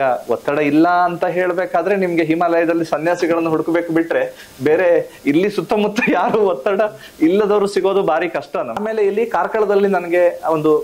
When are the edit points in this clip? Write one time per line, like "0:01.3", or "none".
0:08.8